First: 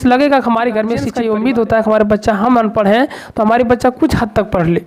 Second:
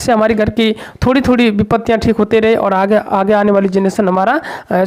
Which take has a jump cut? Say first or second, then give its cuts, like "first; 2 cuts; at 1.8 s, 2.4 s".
first; 1 cut; at 1.1 s